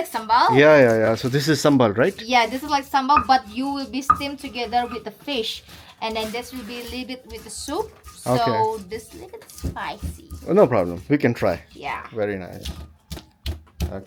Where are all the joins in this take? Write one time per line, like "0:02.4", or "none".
none